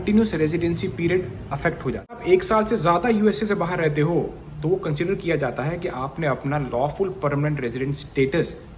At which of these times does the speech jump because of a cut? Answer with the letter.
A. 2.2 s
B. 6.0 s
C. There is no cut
A